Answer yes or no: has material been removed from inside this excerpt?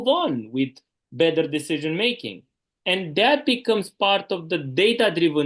no